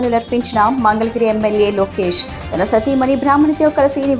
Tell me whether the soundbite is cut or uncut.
uncut